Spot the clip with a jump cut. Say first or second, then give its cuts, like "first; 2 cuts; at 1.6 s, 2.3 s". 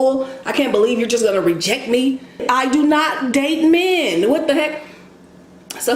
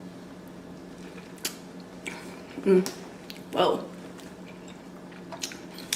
first; 1 cut; at 2.5 s